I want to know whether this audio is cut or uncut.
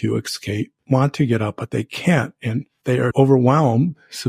cut